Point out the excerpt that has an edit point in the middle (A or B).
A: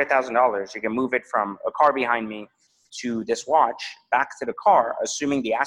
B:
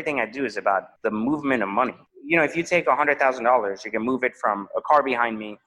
B